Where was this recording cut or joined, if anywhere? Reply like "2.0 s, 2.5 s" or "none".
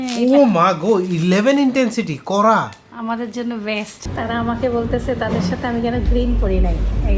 2.8 s, 4.1 s

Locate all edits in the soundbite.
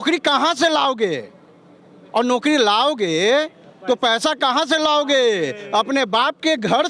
none

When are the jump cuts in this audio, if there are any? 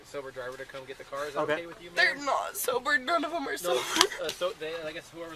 none

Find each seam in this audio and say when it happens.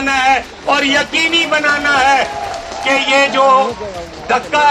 none

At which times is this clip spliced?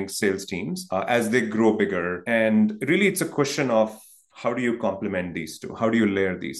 0.8 s, 2.2 s

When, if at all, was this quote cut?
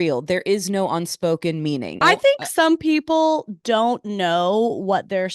2.0 s

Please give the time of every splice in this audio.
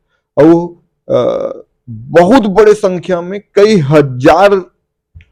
none

